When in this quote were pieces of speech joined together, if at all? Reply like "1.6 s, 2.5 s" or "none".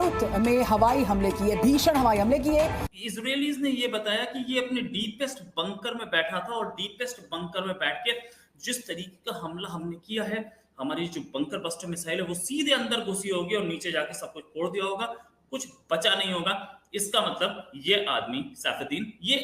2.9 s

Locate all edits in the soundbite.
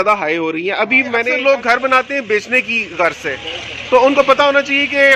1.3 s

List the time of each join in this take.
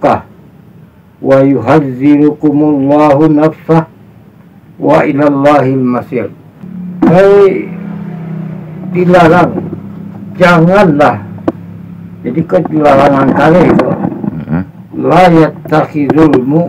none

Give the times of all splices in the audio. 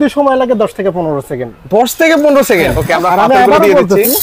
2.8 s

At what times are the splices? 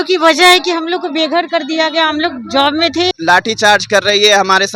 3.1 s

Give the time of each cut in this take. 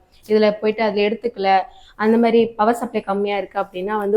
none

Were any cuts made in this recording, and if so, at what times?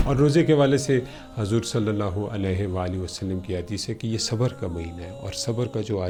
none

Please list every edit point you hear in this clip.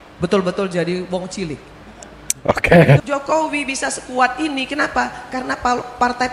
3.0 s

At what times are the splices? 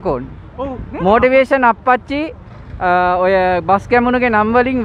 none

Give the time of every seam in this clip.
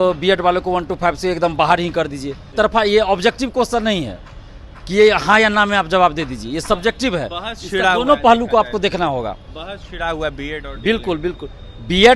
2.4 s

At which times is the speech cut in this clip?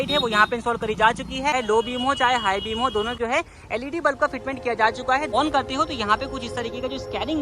1.5 s, 3.1 s, 5.3 s

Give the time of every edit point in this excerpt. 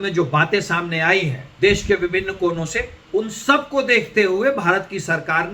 1.4 s, 2.9 s

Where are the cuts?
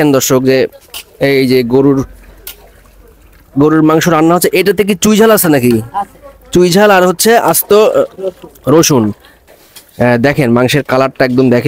9.4 s

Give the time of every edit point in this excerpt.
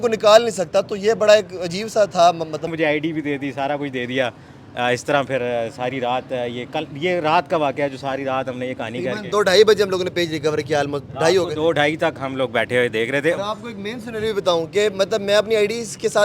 2.7 s

